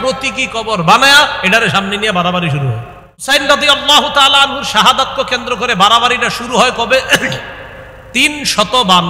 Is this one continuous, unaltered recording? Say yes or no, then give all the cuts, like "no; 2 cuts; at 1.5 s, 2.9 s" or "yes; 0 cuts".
no; 1 cut; at 3.3 s